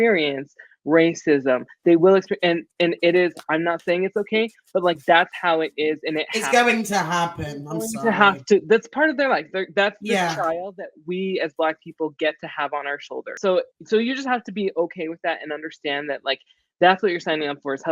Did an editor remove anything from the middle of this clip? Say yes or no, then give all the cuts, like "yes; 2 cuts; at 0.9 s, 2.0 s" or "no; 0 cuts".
yes; 1 cut; at 13.3 s